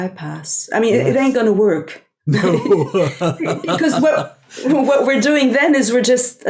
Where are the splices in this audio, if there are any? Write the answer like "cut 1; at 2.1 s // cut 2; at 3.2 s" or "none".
cut 1; at 1.4 s